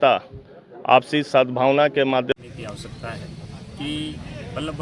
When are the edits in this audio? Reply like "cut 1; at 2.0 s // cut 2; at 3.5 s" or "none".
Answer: cut 1; at 2.3 s